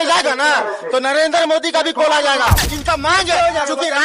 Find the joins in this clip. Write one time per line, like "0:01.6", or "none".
0:02.6